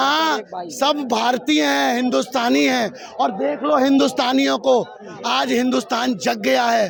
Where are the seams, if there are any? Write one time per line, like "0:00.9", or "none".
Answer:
none